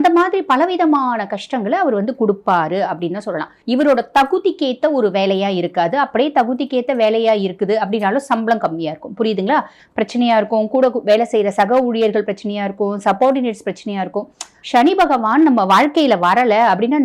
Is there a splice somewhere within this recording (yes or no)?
yes